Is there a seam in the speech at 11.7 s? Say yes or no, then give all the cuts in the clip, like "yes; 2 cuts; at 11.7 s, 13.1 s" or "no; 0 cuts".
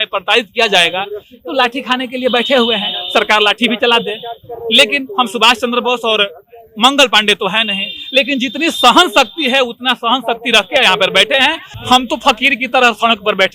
yes; 1 cut; at 11.7 s